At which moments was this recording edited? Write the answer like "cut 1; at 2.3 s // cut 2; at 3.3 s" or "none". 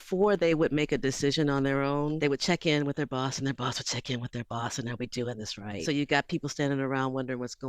cut 1; at 2.2 s // cut 2; at 5.8 s